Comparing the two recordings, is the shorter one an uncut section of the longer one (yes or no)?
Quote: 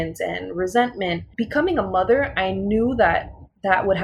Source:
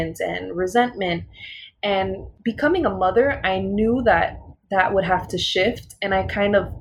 no